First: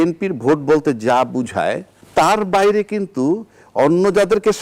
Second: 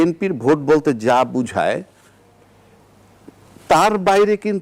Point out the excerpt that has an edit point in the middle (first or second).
first